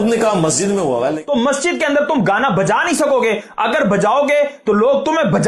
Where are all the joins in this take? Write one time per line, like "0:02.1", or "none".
0:01.2